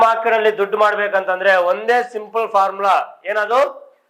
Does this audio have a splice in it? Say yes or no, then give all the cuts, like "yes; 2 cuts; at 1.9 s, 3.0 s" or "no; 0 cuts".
no; 0 cuts